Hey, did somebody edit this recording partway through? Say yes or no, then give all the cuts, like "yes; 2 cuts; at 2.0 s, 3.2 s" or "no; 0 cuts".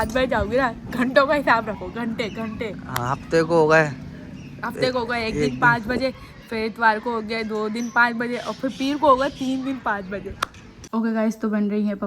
yes; 1 cut; at 10.8 s